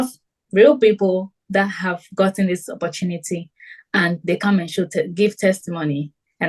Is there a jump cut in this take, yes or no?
no